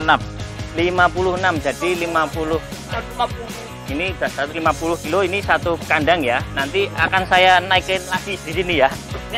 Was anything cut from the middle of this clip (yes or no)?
yes